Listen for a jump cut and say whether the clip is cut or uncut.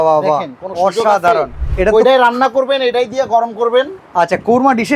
cut